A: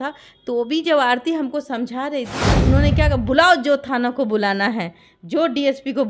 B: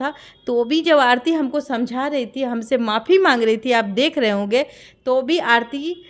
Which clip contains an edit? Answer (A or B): A